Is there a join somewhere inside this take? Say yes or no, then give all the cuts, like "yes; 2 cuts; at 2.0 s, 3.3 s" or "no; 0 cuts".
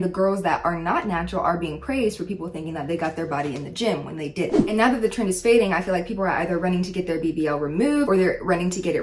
yes; 2 cuts; at 4.6 s, 8.1 s